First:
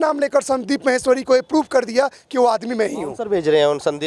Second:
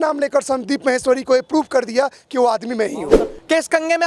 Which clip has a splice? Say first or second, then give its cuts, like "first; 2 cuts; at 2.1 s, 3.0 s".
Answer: second; 1 cut; at 3.1 s